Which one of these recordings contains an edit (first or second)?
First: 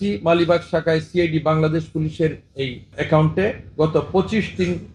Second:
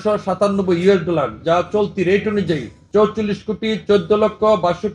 second